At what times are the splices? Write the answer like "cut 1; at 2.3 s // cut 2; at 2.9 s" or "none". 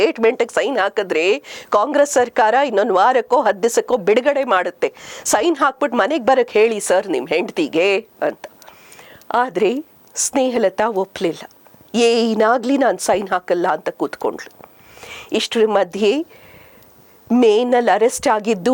none